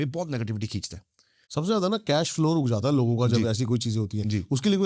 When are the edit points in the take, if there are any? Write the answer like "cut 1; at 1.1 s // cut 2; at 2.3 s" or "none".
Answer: cut 1; at 1.4 s